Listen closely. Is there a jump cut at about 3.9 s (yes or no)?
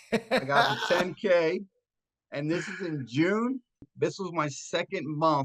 yes